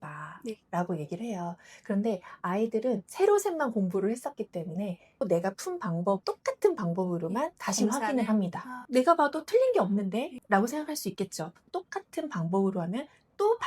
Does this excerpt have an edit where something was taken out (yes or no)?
yes